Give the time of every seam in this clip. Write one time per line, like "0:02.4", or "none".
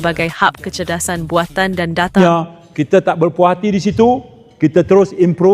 0:02.2